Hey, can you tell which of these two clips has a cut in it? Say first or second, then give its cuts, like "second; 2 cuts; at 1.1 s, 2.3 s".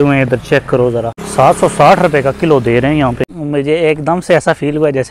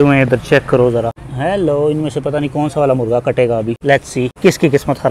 first; 2 cuts; at 1.2 s, 3.3 s